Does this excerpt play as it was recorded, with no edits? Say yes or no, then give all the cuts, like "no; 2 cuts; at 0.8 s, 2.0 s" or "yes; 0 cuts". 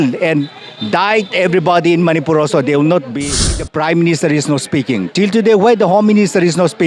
no; 1 cut; at 3.6 s